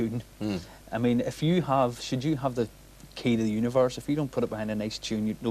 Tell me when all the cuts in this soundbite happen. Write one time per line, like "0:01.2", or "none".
none